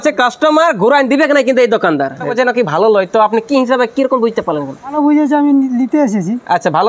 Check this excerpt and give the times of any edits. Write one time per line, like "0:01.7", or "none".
0:02.3
0:04.9